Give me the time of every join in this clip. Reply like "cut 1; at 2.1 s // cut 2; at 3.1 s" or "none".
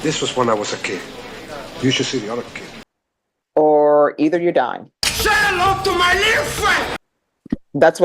cut 1; at 7.0 s